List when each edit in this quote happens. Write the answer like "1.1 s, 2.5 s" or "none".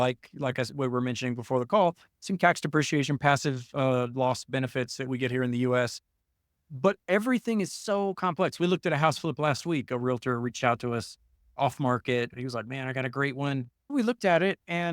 12.4 s